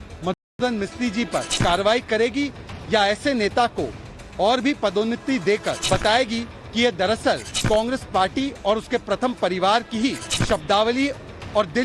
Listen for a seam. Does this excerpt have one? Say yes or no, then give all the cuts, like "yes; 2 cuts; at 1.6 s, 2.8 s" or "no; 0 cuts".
yes; 4 cuts; at 1.5 s, 5.7 s, 7.5 s, 10.3 s